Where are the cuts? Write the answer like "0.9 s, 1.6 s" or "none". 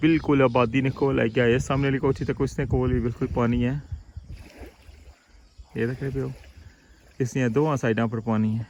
none